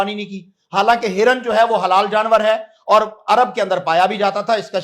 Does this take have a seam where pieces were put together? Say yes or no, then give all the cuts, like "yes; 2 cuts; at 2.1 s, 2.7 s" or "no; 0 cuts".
no; 0 cuts